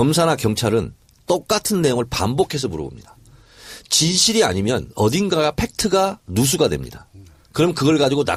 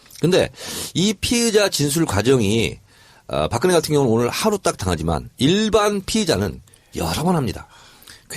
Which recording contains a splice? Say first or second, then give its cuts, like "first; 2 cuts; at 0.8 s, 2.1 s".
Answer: second; 1 cut; at 4.4 s